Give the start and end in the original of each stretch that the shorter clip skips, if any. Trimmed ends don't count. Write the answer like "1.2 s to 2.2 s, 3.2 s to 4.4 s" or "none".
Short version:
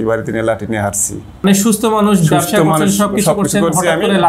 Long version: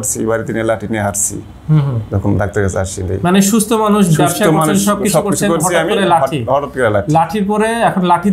1.6 s to 3.3 s